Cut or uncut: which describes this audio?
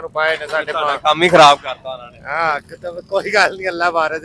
uncut